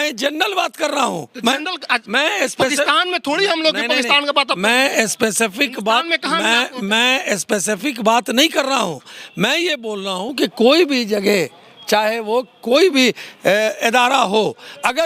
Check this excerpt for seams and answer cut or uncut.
uncut